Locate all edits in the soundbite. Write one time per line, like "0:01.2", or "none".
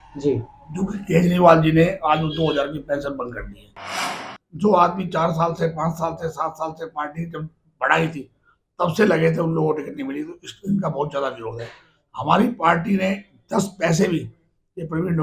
0:04.2

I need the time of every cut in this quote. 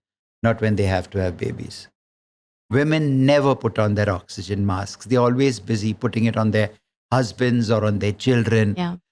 0:02.5

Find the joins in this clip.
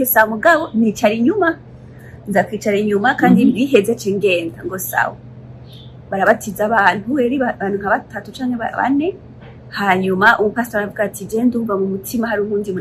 none

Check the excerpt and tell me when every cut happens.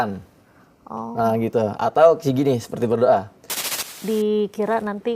0:03.8

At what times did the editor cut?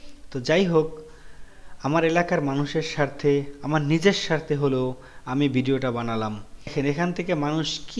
0:06.7

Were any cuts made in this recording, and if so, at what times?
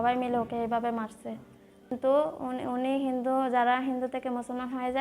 0:01.9

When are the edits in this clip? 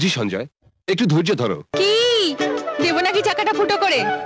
0:01.7

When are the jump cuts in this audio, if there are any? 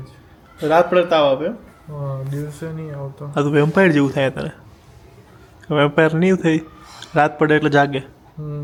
none

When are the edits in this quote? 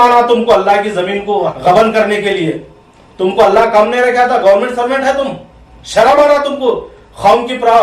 0:01.5

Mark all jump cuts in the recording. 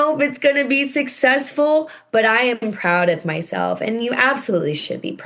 none

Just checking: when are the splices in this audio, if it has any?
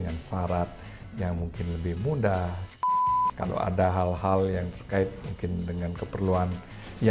0:03.0

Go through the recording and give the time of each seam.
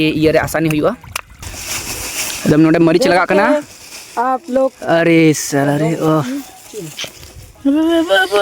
0:01.5

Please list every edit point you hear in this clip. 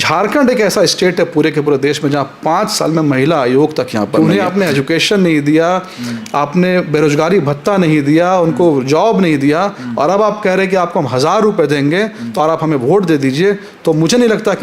0:04.1

